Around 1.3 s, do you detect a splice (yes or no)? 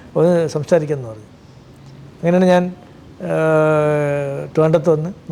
no